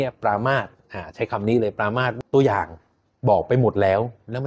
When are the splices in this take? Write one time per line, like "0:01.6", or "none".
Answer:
0:02.2